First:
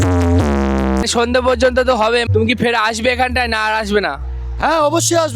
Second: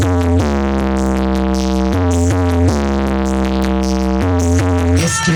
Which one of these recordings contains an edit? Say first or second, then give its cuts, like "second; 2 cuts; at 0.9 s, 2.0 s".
first; 2 cuts; at 1.0 s, 2.3 s